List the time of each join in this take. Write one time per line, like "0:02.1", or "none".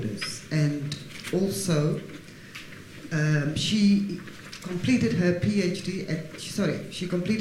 none